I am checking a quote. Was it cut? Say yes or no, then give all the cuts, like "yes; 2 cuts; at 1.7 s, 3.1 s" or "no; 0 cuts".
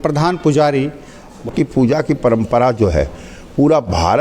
yes; 1 cut; at 1.4 s